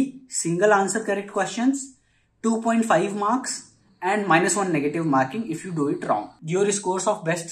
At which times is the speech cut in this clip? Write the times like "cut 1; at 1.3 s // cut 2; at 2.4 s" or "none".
cut 1; at 6.3 s